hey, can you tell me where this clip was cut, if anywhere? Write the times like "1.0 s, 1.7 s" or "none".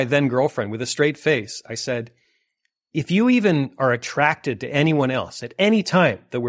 none